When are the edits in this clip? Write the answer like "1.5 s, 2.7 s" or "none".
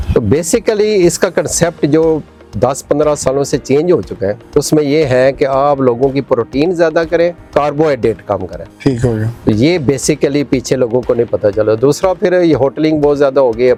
none

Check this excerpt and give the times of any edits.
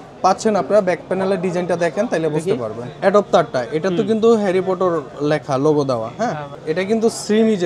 2.9 s, 6.5 s

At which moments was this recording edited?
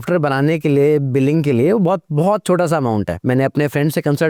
none

